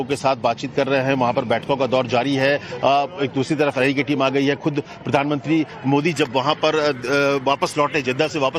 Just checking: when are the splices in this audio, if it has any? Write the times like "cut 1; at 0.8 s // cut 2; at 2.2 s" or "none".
none

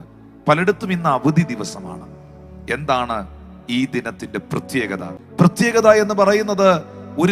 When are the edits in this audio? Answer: cut 1; at 5.2 s

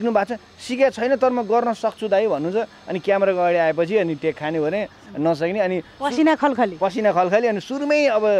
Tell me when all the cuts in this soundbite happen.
none

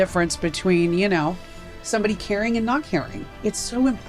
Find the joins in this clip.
cut 1; at 3.2 s

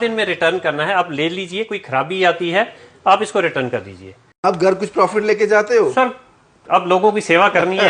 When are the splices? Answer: cut 1; at 4.4 s

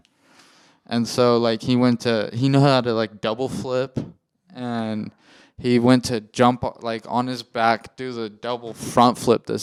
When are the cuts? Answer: none

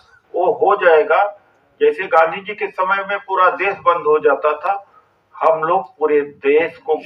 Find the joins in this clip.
none

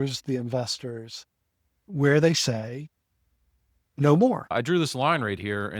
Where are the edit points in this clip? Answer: cut 1; at 4.5 s

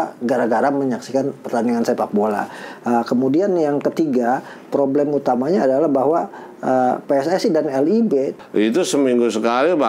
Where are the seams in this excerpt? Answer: cut 1; at 8.4 s

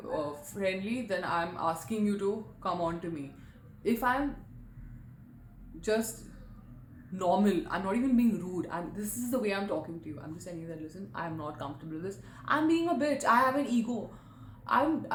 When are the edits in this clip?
none

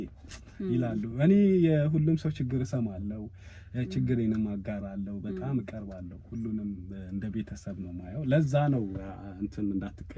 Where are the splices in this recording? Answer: none

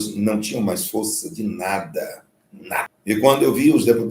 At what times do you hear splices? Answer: cut 1; at 2.9 s

